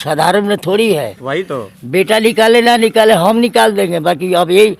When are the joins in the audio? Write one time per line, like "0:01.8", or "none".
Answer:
none